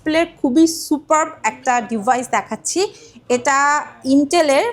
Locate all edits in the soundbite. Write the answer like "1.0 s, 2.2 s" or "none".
none